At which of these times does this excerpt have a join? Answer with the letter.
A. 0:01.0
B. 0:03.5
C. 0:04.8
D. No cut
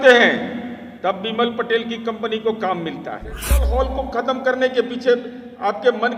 B